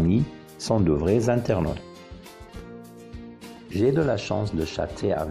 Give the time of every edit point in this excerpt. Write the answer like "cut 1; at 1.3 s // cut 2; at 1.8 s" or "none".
cut 1; at 1.8 s // cut 2; at 3.4 s